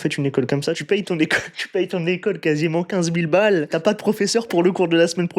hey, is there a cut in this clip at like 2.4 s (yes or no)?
no